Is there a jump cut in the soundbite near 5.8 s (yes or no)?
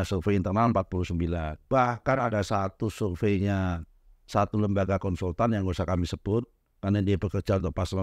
no